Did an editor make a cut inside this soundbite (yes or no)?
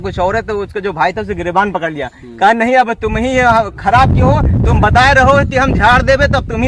no